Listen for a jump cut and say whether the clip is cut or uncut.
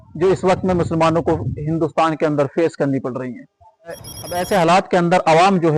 cut